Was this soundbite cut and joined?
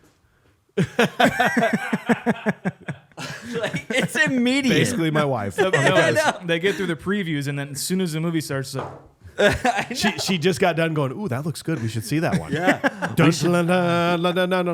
no; 0 cuts

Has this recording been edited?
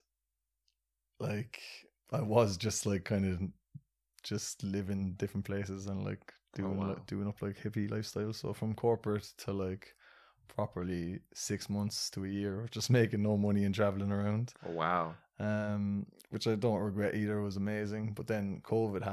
no; 0 cuts

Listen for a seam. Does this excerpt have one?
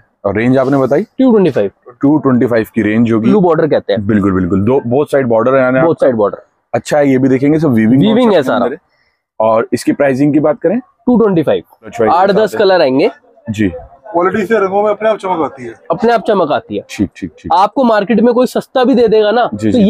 yes; 2 cuts; at 3.3 s, 11.9 s

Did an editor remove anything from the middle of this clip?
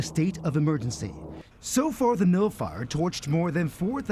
no; 0 cuts

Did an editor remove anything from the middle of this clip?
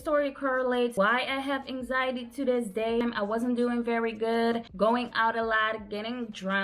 yes; 1 cut; at 3.0 s

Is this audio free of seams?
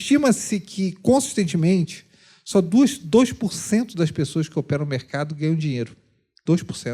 yes; 0 cuts

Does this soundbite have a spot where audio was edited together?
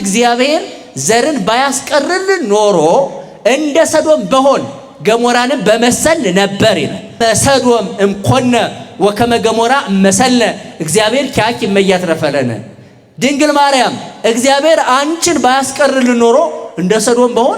yes; 1 cut; at 7.2 s

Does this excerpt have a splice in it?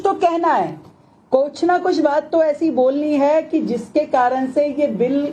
no; 0 cuts

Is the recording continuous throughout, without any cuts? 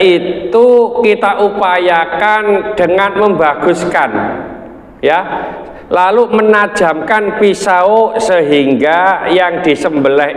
yes; 0 cuts

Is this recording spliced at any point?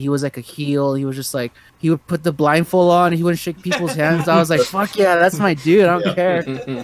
no; 0 cuts

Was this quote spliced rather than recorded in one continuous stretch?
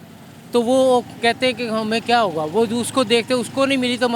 no; 0 cuts

